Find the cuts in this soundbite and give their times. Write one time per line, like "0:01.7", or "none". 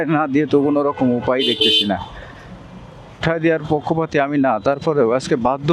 0:03.2